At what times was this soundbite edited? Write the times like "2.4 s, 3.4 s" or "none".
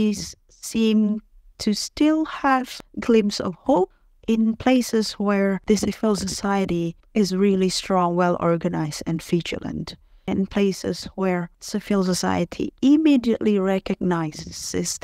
2.7 s, 4.1 s, 5.6 s, 10.3 s, 11.6 s

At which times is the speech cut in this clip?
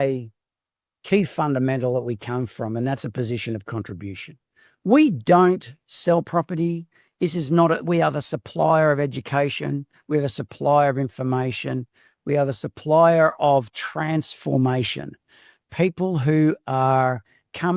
none

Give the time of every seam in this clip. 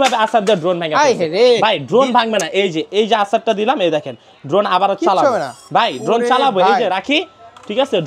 none

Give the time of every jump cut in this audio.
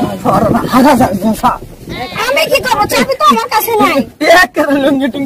none

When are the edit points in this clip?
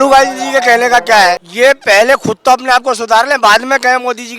1.5 s

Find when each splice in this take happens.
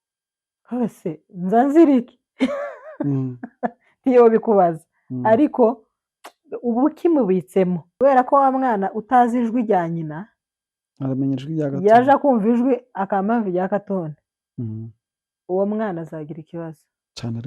7.9 s

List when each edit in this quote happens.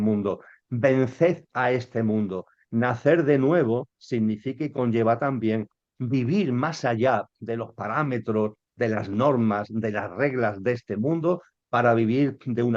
none

